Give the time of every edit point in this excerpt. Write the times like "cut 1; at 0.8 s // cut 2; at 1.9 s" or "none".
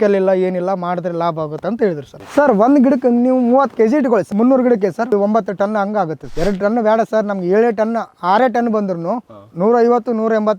cut 1; at 2.1 s // cut 2; at 4.3 s // cut 3; at 5.1 s // cut 4; at 6.2 s